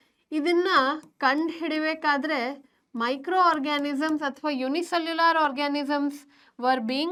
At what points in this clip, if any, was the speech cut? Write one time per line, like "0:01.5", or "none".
none